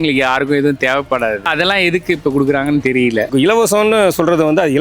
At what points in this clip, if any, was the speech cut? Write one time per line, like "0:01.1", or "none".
0:01.5
0:03.3